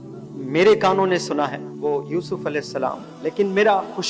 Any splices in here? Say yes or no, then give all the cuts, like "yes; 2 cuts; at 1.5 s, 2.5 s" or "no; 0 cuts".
yes; 2 cuts; at 1.7 s, 3.1 s